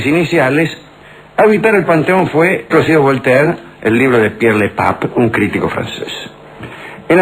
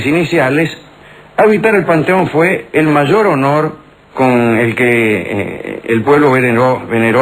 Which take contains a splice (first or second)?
second